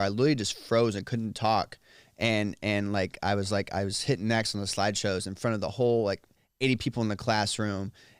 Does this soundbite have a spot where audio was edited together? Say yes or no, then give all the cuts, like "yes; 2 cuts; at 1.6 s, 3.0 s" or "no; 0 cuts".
no; 0 cuts